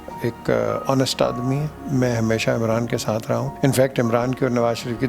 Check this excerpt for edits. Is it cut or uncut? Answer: cut